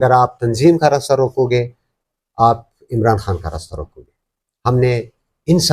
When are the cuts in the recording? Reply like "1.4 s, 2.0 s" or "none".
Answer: none